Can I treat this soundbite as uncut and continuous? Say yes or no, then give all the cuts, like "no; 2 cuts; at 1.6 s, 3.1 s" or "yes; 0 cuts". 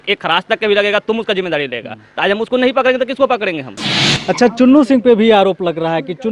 no; 1 cut; at 4.1 s